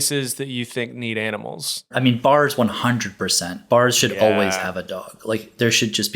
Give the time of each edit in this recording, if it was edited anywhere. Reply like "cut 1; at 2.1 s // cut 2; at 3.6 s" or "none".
cut 1; at 1.9 s